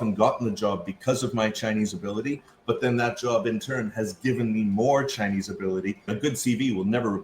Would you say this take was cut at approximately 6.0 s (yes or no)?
yes